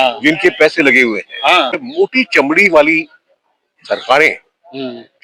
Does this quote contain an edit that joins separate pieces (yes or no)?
yes